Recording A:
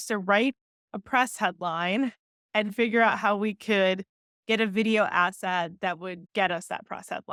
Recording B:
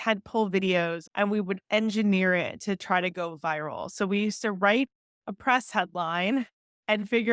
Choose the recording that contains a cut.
B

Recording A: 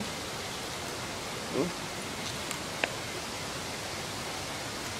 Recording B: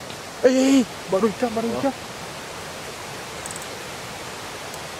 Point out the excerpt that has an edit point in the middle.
B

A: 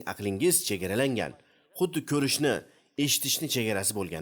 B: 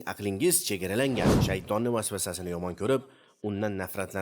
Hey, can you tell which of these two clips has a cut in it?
B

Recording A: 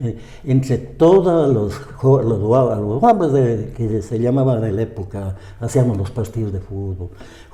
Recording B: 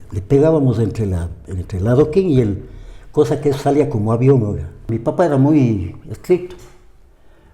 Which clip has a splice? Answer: B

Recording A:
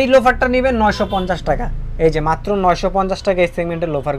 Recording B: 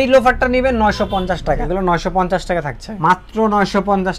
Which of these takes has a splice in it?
B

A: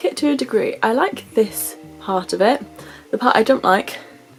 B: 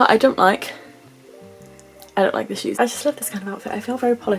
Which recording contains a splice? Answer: B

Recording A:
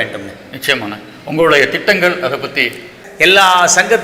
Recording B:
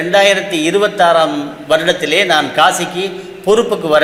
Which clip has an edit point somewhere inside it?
A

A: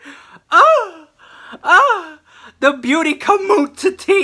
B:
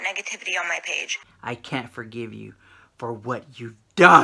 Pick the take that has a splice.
B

